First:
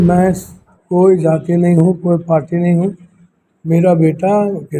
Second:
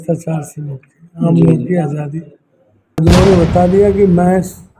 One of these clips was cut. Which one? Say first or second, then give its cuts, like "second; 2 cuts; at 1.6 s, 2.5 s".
second; 1 cut; at 3.0 s